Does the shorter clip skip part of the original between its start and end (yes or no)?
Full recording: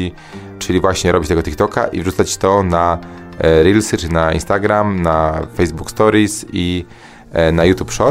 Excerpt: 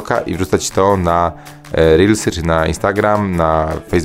no